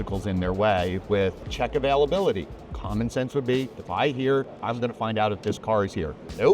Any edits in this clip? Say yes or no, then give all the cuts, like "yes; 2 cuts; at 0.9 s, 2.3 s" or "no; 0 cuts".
yes; 1 cut; at 1.4 s